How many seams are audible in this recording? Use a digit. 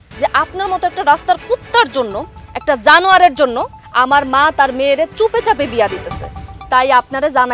1